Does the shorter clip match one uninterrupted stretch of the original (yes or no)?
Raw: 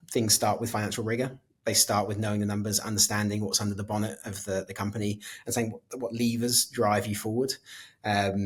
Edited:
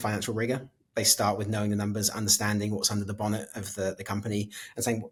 yes